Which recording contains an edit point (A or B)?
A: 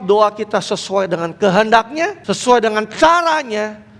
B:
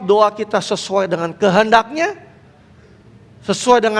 A